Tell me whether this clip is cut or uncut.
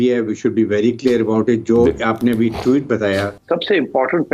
cut